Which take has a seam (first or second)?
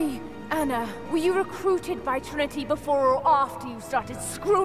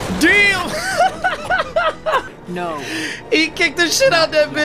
second